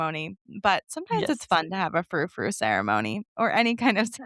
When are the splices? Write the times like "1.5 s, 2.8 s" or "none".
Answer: none